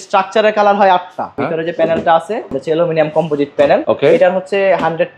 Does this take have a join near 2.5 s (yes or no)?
yes